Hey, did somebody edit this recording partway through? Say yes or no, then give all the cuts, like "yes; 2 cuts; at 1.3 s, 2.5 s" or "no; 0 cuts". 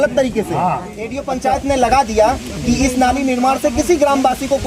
yes; 1 cut; at 1.2 s